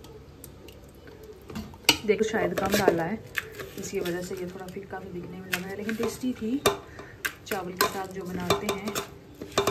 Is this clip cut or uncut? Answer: cut